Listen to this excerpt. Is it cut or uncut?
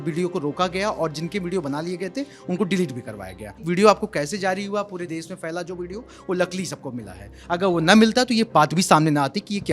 cut